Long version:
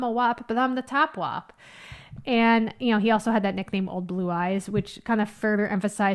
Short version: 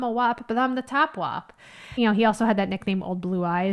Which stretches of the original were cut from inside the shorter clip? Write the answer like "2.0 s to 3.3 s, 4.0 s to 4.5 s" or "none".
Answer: 1.9 s to 2.8 s